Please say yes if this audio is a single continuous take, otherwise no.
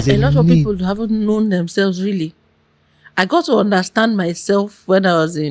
yes